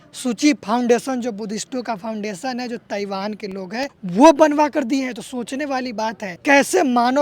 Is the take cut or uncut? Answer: cut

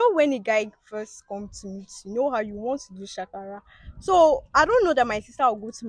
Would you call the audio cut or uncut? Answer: uncut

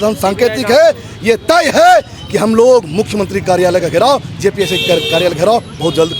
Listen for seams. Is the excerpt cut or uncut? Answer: uncut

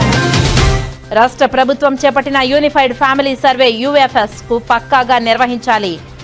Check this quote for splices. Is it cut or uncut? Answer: cut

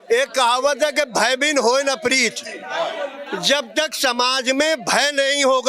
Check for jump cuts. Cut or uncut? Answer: uncut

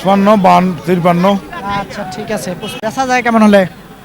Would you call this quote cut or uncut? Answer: cut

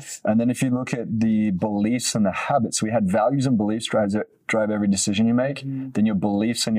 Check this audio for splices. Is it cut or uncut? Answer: uncut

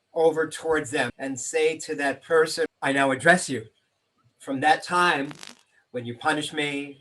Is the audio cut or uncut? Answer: cut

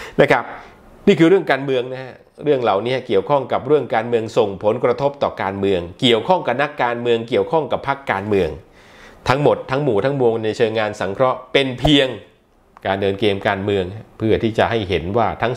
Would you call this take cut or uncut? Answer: uncut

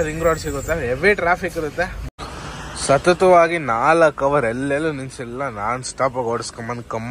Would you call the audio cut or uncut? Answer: cut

